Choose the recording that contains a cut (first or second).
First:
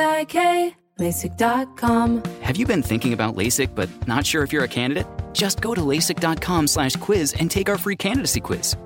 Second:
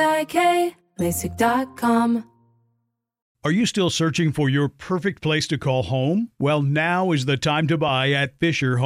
first